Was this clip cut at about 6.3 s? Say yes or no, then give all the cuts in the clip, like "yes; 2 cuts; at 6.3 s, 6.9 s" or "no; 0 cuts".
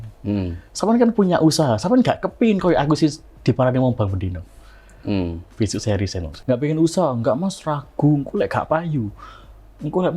yes; 1 cut; at 6.3 s